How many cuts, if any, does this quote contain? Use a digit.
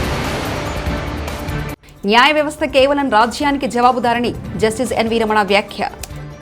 1